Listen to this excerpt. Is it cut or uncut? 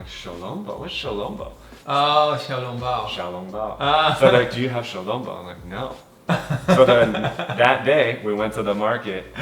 uncut